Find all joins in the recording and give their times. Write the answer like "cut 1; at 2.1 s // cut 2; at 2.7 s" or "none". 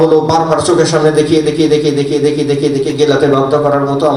none